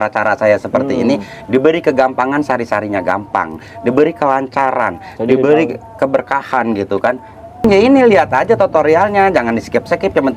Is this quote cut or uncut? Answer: cut